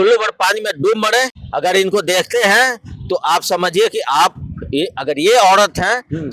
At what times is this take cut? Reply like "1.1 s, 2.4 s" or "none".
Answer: 1.4 s